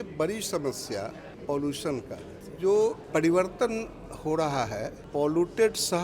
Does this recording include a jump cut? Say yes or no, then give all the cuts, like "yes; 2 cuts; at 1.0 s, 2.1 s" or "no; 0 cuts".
yes; 4 cuts; at 1.3 s, 2.4 s, 3.0 s, 5.0 s